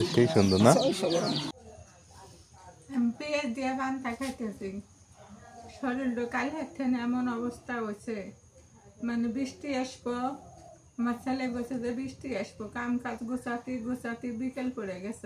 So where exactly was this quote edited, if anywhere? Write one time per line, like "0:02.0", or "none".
0:01.5